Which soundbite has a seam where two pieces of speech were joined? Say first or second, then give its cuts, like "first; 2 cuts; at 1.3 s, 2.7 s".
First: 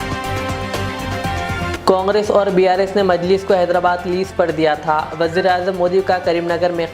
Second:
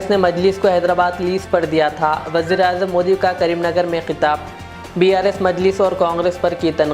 first; 1 cut; at 1.7 s